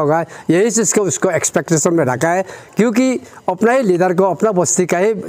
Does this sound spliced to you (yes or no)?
no